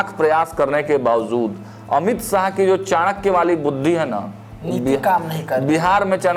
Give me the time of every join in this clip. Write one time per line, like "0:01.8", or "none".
none